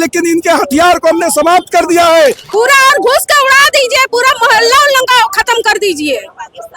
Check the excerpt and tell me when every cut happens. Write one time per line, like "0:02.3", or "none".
0:02.4